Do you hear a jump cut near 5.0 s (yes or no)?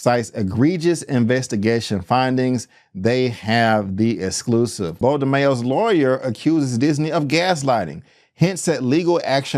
yes